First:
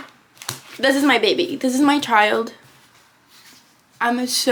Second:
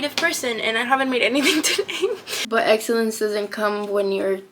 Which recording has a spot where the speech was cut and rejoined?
second; 1 cut; at 2.3 s

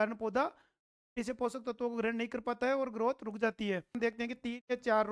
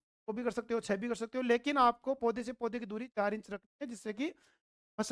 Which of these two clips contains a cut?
first; 1 cut; at 3.9 s

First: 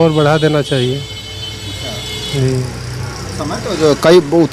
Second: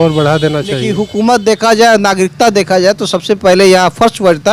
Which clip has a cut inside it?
second; 1 cut; at 0.9 s

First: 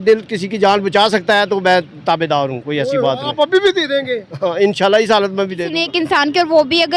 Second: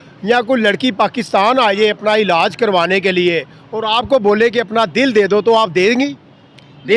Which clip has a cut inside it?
first; 1 cut; at 5.6 s

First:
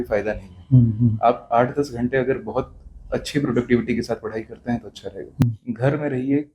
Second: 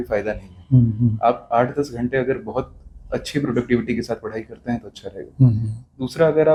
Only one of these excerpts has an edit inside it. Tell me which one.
first; 1 cut; at 5.4 s

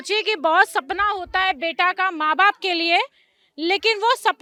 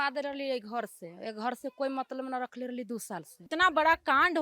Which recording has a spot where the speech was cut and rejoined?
second; 1 cut; at 3.5 s

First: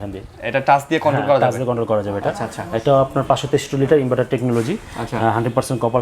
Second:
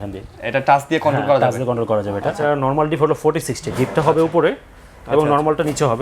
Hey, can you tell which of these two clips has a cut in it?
second; 1 cut; at 2.4 s

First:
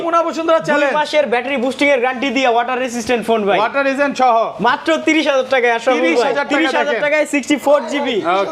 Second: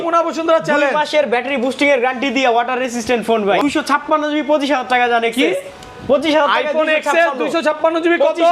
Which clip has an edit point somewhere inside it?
second; 1 cut; at 3.6 s

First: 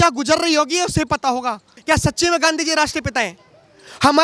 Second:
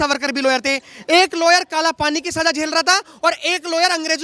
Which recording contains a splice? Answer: first; 1 cut; at 1.7 s

